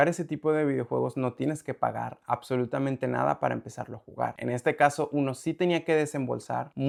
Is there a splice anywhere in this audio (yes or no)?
no